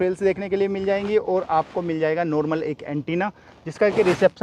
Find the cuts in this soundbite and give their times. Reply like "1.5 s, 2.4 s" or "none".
none